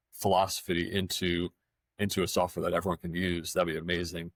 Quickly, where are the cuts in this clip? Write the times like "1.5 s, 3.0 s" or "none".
none